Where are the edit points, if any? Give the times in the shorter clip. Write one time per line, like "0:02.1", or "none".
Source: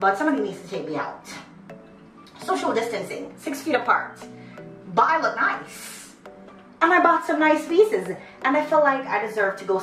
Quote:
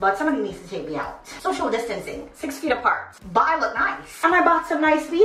0:01.2
0:03.1
0:04.1